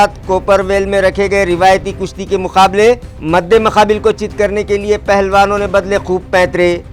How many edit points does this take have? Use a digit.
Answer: 0